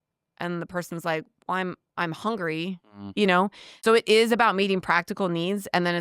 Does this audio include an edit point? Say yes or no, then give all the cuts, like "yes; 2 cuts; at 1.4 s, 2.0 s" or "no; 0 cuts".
yes; 1 cut; at 3.7 s